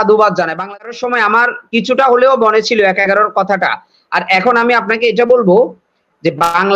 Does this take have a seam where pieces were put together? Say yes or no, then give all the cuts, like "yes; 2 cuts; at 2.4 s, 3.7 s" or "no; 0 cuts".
yes; 1 cut; at 0.9 s